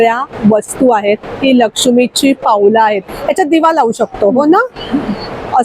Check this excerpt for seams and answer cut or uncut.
uncut